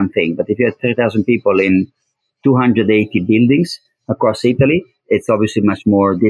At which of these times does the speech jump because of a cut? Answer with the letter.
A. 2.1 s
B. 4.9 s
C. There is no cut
B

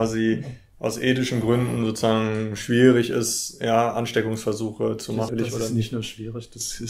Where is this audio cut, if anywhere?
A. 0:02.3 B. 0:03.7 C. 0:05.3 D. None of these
C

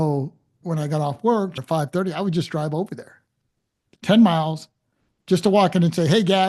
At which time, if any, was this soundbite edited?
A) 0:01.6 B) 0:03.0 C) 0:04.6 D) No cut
A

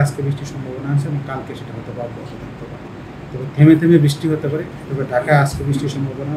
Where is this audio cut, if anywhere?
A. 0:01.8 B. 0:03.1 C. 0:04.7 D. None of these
C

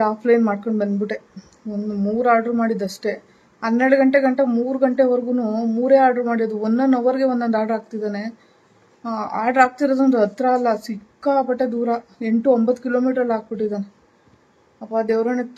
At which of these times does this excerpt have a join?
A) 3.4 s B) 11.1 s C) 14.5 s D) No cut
D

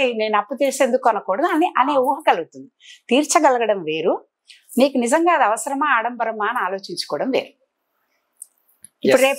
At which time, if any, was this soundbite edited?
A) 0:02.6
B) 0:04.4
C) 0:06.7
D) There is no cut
D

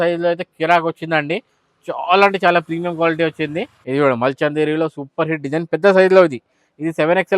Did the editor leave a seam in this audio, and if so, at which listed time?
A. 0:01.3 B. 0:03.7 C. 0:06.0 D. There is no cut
B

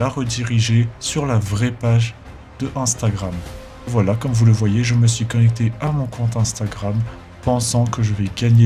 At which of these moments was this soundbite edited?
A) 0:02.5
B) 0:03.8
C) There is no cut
B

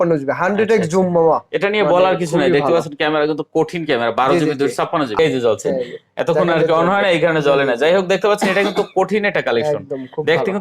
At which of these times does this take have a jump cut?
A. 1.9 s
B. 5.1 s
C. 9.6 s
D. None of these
B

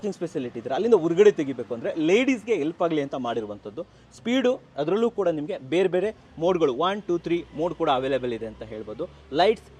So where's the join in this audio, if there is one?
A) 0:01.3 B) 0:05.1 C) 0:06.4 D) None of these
D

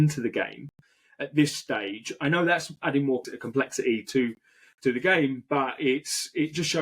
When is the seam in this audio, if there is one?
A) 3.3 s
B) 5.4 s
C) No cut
A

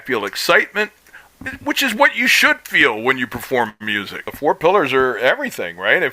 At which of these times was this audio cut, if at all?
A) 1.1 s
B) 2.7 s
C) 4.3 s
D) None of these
C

